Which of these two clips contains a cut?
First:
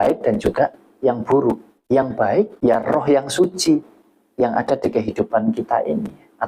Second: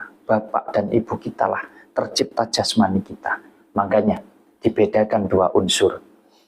first; 2 cuts; at 1.7 s, 2.5 s

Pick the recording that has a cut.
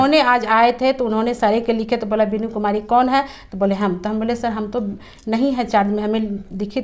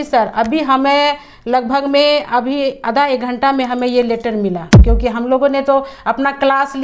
second; 1 cut; at 4.8 s

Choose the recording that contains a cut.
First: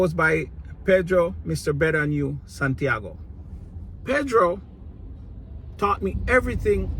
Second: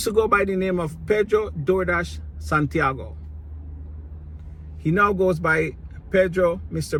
first; 1 cut; at 3.9 s

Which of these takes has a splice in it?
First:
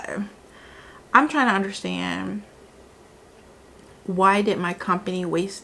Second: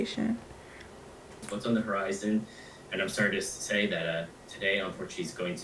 second; 1 cut; at 1.5 s

